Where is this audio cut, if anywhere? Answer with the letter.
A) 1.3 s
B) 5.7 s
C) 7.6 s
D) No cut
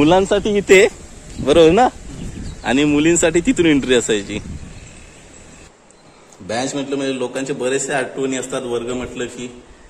B